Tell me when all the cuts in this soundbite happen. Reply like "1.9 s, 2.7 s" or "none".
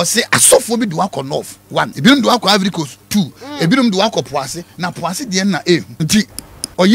1.9 s, 5.9 s